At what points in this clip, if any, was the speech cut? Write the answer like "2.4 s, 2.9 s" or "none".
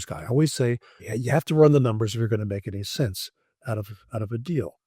1.0 s